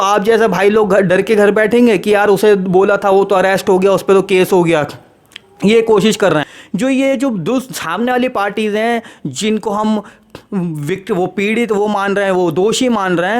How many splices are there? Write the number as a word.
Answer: one